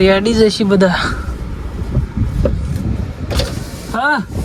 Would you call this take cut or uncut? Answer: uncut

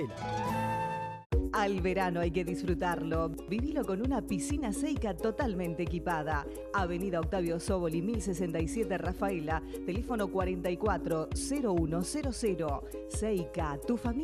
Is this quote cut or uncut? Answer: cut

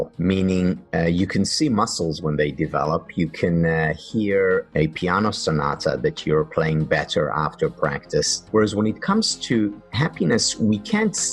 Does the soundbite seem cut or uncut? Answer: cut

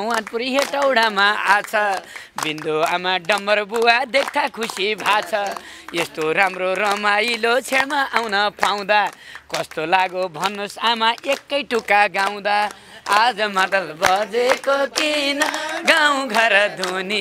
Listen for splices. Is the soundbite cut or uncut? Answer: uncut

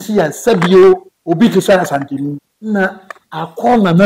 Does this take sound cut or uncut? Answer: cut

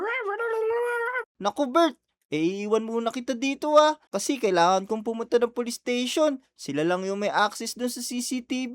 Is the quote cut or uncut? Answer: cut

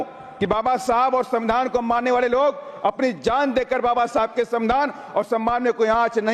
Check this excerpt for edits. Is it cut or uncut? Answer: uncut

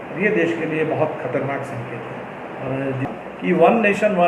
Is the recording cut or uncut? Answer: cut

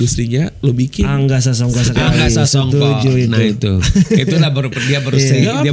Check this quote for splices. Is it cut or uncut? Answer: uncut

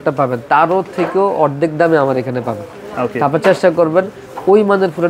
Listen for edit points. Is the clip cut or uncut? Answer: uncut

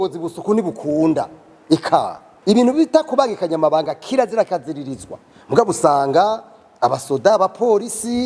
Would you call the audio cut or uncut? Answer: cut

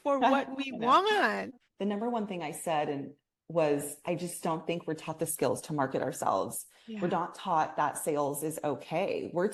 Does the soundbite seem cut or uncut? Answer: uncut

